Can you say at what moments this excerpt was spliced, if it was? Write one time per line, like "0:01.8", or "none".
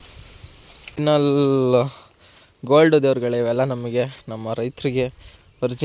0:01.0